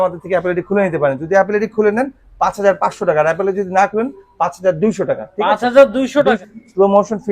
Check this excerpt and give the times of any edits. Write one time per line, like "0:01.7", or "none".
0:06.4